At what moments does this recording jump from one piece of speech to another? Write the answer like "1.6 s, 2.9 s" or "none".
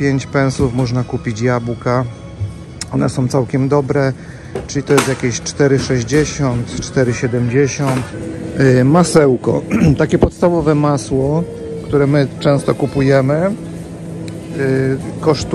none